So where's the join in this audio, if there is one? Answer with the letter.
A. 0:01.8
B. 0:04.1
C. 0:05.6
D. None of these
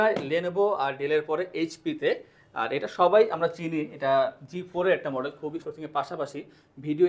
C